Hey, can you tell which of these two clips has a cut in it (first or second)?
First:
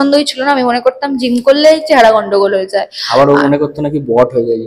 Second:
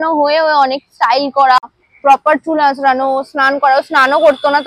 second